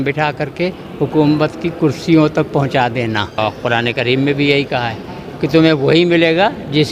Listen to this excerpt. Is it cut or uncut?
cut